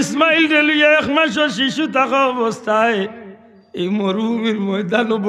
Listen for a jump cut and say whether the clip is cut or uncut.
uncut